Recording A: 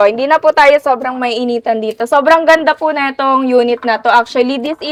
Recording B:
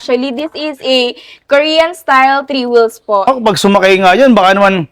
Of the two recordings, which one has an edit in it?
B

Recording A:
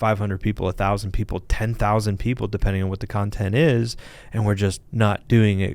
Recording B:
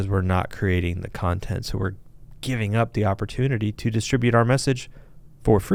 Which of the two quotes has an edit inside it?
A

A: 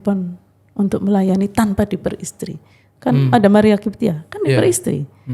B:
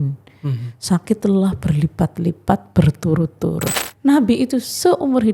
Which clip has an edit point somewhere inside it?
B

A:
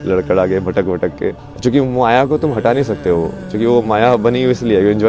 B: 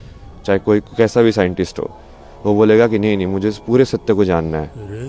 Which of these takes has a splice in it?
A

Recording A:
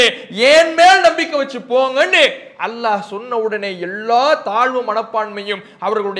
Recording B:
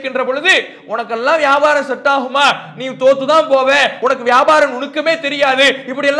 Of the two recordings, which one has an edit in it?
B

